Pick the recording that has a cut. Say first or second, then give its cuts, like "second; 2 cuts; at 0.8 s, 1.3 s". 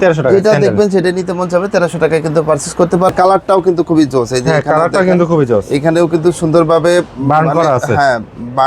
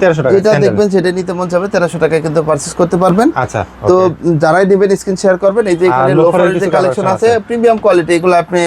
first; 1 cut; at 3.1 s